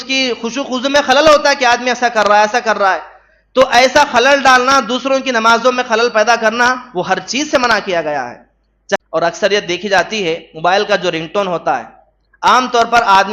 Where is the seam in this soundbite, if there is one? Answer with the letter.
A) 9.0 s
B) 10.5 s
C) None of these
A